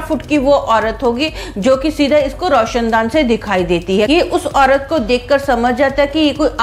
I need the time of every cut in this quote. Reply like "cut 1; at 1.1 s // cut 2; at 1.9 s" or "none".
cut 1; at 4.1 s